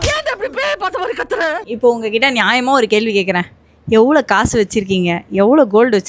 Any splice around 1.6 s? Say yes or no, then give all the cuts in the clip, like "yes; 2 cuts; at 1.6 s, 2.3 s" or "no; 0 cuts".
yes; 1 cut; at 1.6 s